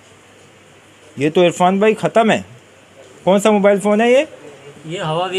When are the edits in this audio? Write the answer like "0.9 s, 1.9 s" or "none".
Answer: none

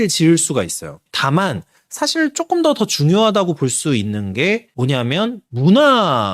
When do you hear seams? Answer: 1.0 s

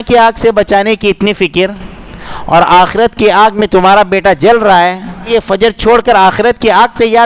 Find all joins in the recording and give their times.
5.3 s

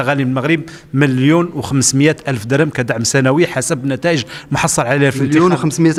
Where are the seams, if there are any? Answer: none

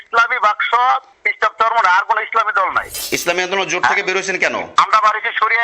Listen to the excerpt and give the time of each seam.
3.0 s

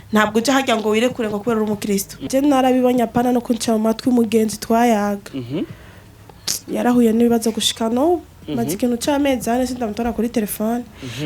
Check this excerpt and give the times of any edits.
2.3 s

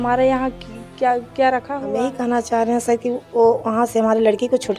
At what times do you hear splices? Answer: 1.8 s

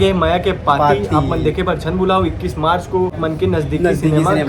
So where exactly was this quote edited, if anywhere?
3.2 s

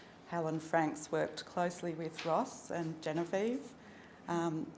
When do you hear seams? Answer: none

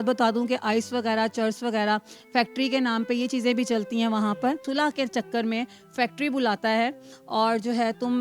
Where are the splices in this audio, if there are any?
4.7 s, 7.1 s

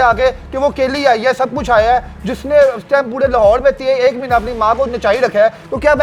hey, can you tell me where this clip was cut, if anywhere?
none

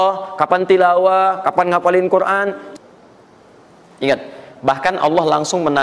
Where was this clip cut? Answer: 2.6 s

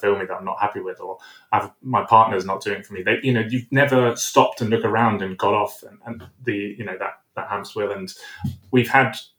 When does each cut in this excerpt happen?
none

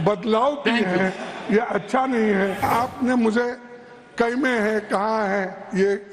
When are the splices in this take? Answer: 2.6 s

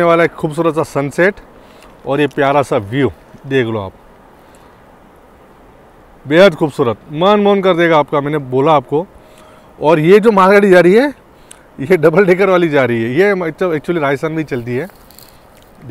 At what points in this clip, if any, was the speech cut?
none

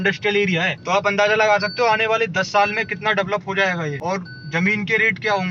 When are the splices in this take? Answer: 4.0 s

